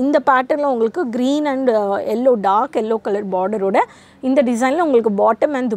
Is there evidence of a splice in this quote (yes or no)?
no